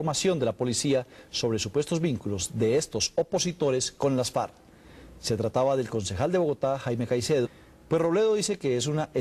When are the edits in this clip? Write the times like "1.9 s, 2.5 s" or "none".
none